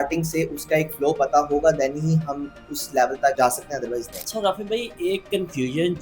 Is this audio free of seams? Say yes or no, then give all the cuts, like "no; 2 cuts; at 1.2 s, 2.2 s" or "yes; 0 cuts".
no; 1 cut; at 4.1 s